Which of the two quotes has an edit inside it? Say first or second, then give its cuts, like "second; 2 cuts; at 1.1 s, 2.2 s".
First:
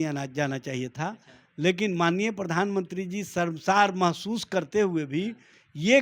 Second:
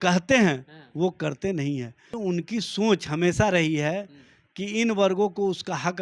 second; 1 cut; at 2.0 s